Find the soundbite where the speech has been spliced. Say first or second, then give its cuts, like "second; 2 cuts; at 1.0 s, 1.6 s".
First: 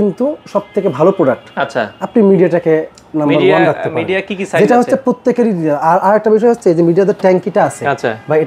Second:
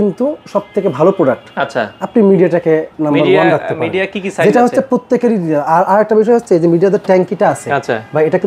second; 1 cut; at 2.9 s